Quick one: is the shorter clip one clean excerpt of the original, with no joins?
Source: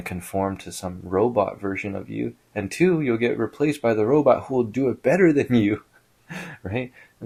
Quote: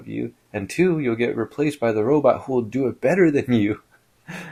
yes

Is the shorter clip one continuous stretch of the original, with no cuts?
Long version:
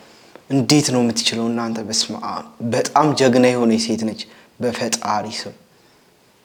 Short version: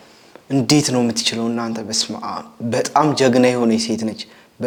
yes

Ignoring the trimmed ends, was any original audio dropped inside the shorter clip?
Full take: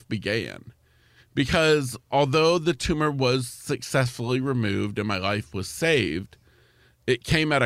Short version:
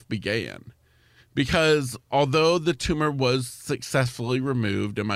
no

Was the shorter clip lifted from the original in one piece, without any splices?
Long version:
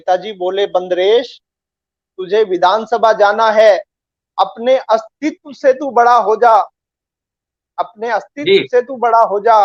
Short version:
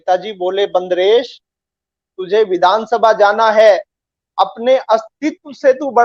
yes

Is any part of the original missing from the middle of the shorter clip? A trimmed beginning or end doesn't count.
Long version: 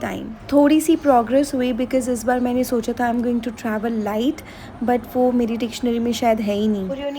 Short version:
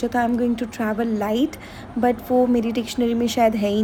no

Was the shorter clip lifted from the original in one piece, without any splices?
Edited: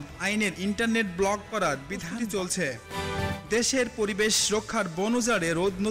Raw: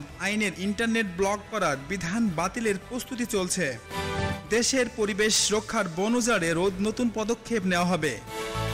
no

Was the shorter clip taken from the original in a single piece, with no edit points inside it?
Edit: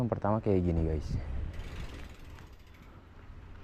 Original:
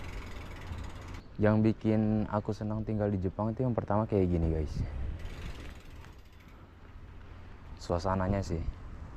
yes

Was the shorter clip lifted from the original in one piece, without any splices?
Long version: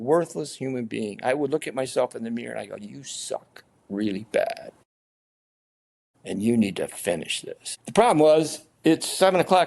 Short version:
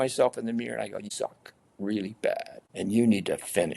no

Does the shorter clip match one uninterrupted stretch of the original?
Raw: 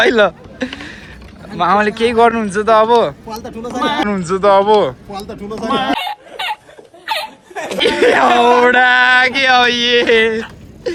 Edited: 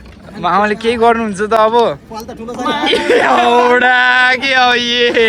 no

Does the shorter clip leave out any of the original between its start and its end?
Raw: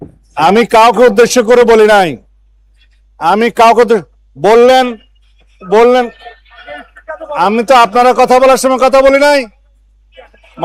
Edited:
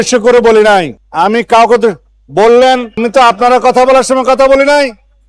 yes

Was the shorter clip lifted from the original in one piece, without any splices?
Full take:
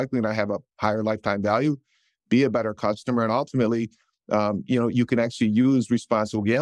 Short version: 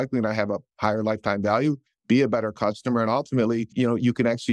no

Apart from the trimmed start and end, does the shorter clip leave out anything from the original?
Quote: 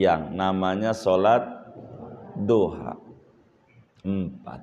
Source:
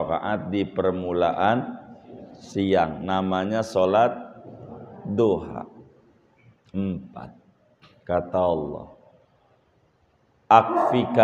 no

